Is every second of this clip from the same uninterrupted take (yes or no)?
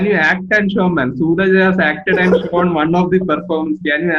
yes